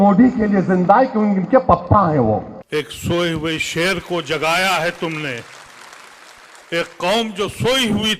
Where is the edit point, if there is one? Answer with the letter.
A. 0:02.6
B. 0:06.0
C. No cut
A